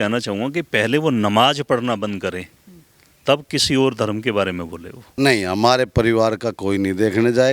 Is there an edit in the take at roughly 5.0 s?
yes; 1 cut; at 5.0 s

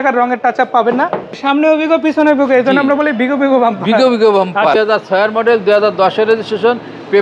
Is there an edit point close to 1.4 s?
yes; 2 cuts; at 1.4 s, 4.7 s

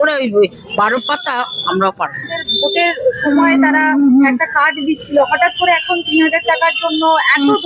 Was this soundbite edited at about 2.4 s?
yes; 1 cut; at 2.4 s

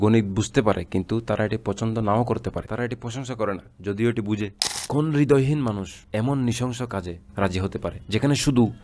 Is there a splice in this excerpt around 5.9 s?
yes; 4 cuts; at 2.6 s, 4.7 s, 5.9 s, 8.0 s

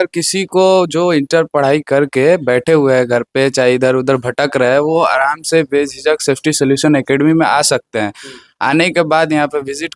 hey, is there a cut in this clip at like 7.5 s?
no; 0 cuts

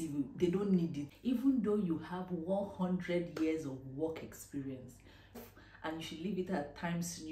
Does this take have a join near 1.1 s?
yes; 2 cuts; at 1.1 s, 5.4 s

